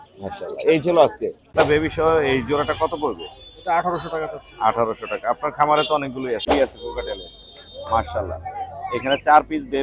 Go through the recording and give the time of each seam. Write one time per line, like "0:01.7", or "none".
0:01.5
0:06.5